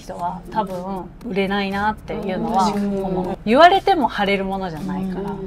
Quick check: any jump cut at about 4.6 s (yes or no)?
no